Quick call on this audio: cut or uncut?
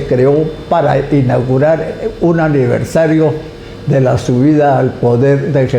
uncut